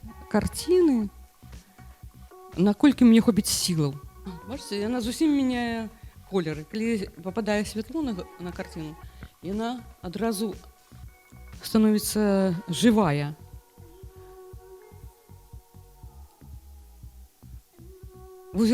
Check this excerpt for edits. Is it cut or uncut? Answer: uncut